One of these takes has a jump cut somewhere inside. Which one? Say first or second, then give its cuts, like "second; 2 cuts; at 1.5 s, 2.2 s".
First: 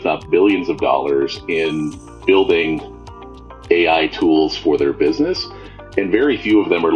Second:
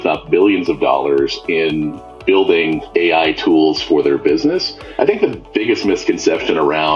second; 2 cuts; at 2.8 s, 4.8 s